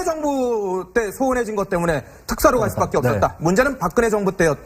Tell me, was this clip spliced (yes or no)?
yes